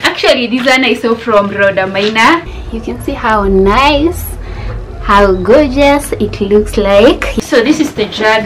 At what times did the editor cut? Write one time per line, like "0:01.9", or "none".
0:02.5
0:07.3